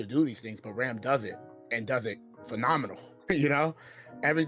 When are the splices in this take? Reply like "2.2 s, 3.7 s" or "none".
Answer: 3.0 s